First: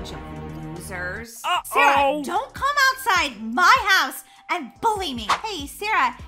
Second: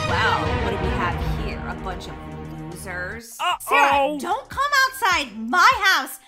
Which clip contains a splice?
first; 1 cut; at 5.3 s

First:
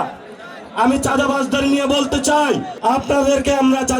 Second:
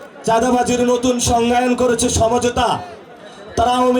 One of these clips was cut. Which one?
first; 1 cut; at 2.7 s

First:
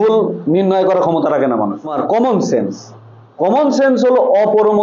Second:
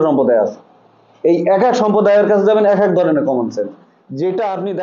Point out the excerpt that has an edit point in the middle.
first; 1 cut; at 1.9 s

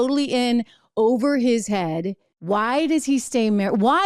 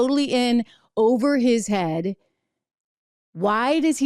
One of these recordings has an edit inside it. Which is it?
first; 1 cut; at 2.3 s

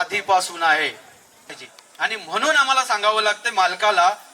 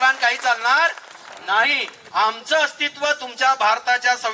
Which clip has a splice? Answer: first; 1 cut; at 1.6 s

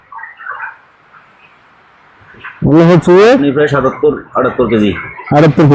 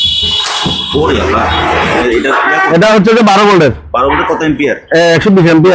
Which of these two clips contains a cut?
second; 1 cut; at 2.0 s

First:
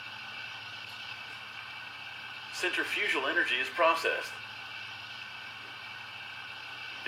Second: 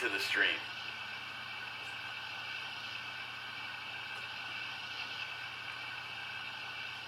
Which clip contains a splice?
first; 1 cut; at 2.0 s

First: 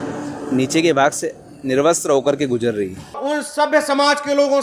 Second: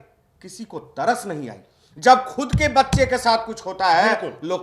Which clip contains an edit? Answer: first; 1 cut; at 3.2 s

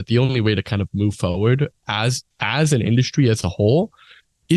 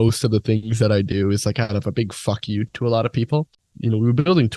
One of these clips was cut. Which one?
second; 1 cut; at 3.5 s

